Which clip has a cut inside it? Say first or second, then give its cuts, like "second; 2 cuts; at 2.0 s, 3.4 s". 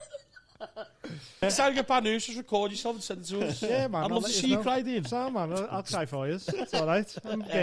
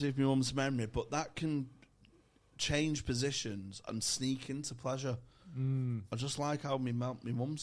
first; 1 cut; at 1.4 s